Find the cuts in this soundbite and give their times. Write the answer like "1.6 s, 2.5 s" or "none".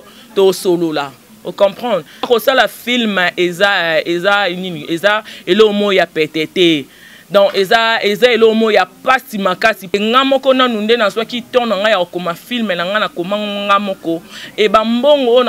2.2 s, 9.9 s